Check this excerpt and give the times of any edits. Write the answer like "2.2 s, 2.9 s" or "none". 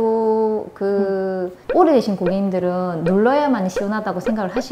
1.5 s

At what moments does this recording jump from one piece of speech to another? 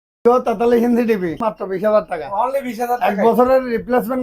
1.4 s

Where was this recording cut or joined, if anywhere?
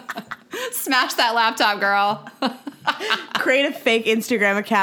none

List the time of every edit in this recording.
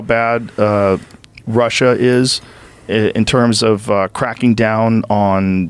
none

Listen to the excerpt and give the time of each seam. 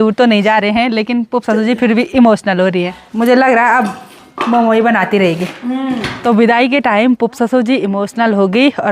3.0 s, 6.1 s

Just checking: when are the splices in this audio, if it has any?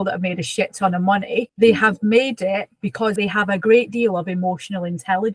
1.5 s, 3.1 s

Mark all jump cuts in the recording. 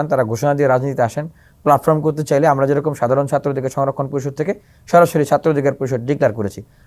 none

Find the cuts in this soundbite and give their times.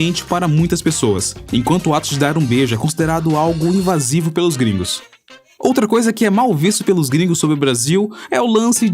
1.7 s

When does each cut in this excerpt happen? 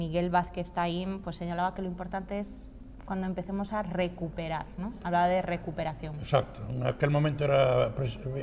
2.1 s

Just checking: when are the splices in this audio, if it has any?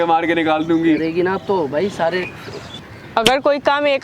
2.7 s

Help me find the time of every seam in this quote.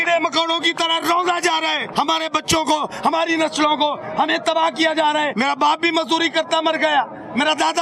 1.9 s, 5.3 s

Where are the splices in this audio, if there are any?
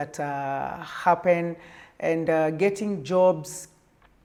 none

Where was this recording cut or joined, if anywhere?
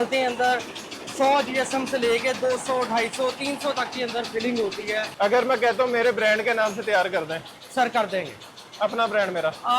5.1 s

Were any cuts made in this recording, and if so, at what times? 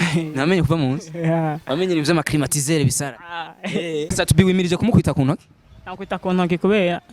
4.1 s

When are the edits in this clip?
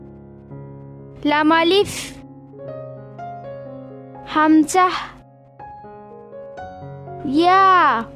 1.1 s

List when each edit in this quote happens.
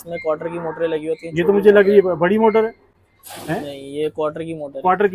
none

